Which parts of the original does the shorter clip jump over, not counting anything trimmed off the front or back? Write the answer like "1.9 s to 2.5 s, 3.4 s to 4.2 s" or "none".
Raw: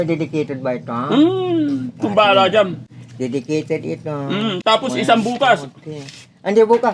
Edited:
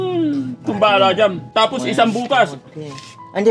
2.8 s to 4.6 s